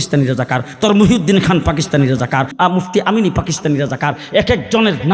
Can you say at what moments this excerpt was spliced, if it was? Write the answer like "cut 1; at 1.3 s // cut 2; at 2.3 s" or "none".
cut 1; at 2.5 s